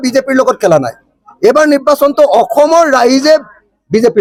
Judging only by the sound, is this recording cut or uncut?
uncut